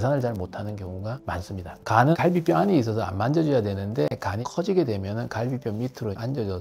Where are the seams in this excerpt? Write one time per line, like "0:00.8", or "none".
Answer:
0:01.7